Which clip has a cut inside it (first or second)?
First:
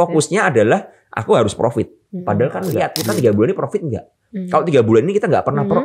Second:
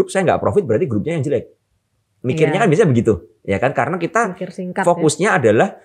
first